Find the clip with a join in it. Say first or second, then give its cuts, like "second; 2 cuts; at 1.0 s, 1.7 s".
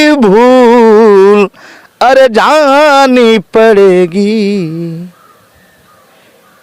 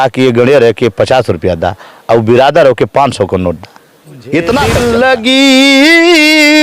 second; 1 cut; at 4.8 s